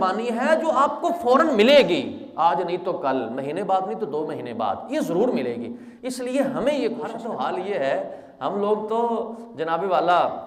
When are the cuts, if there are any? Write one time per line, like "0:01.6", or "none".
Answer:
0:07.2